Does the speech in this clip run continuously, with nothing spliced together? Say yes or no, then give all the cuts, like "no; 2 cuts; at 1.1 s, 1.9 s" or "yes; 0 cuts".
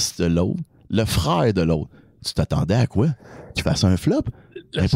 yes; 0 cuts